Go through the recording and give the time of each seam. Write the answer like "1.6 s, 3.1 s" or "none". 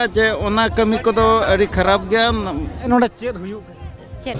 2.9 s